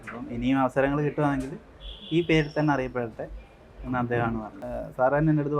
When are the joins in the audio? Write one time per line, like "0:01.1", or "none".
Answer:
0:04.7